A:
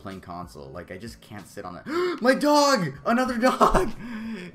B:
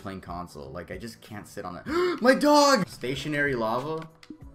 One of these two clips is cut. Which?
B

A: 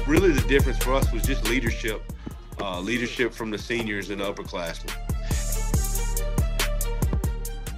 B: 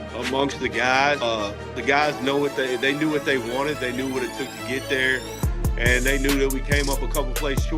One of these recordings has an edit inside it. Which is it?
B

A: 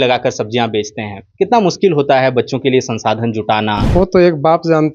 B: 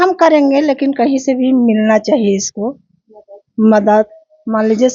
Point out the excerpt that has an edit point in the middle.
A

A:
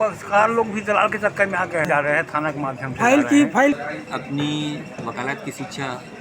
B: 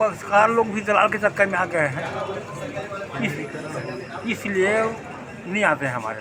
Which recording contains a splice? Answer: A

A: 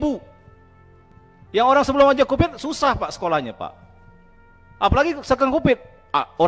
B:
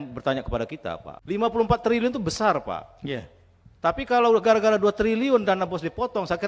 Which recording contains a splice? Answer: B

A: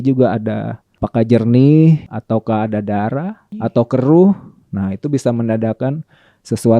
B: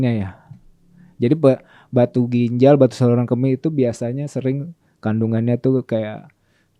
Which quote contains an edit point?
A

